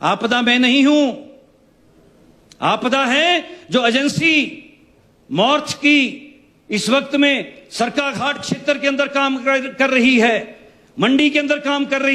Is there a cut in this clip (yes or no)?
no